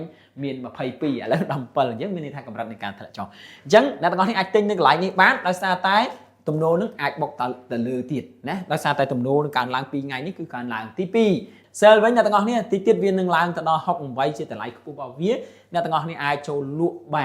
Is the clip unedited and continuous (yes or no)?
no